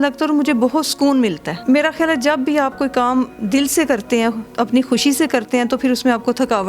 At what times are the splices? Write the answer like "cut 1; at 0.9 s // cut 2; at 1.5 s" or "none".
cut 1; at 1.5 s // cut 2; at 4.4 s